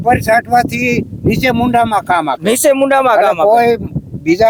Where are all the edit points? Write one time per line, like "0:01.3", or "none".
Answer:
none